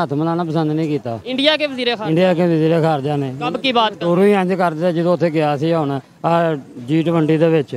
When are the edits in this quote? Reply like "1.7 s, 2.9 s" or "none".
none